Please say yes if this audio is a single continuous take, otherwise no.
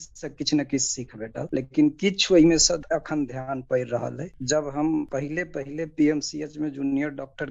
no